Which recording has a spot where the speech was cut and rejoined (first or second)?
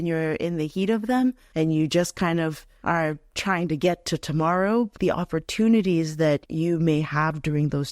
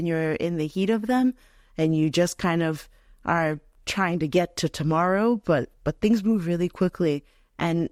first